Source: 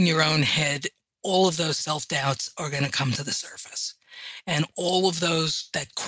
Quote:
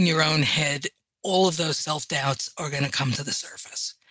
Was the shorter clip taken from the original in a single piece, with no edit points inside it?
yes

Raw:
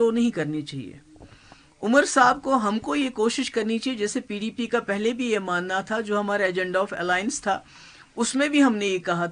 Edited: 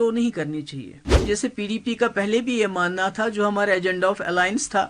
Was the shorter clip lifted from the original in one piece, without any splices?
no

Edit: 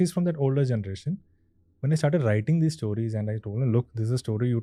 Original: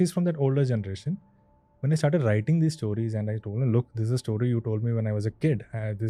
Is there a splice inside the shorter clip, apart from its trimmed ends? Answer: no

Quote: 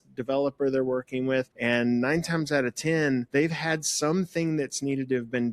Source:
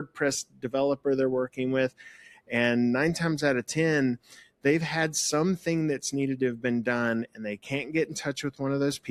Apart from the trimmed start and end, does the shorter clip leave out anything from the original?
yes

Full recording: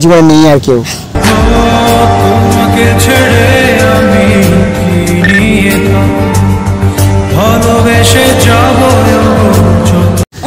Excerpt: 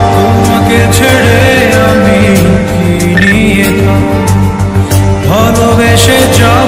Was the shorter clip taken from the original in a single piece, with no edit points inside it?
yes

